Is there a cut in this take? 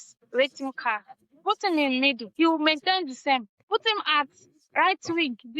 yes; 2 cuts; at 2.2 s, 3.5 s

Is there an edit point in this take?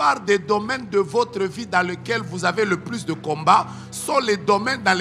no; 0 cuts

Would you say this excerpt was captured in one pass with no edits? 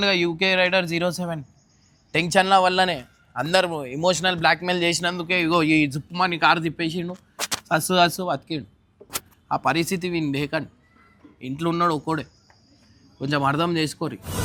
yes; 0 cuts

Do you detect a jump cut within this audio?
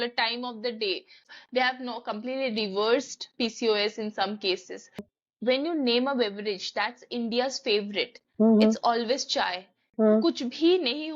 yes; 2 cuts; at 1.2 s, 5.1 s

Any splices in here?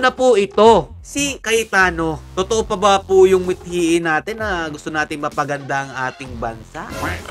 yes; 2 cuts; at 1.4 s, 2.2 s

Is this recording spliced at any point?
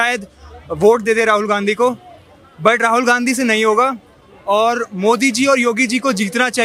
no; 0 cuts

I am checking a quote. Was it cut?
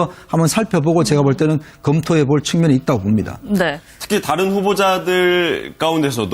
yes; 1 cut; at 5.4 s

